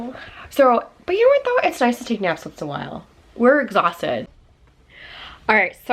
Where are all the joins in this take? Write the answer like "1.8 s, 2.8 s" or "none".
4.3 s